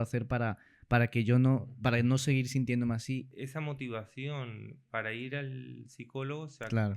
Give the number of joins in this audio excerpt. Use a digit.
1